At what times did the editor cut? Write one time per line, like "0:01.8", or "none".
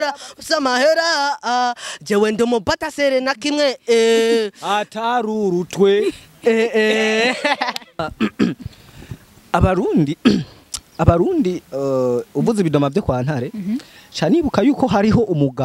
0:08.1